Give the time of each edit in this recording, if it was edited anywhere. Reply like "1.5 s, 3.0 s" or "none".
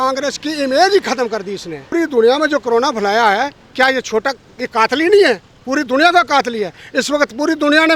1.8 s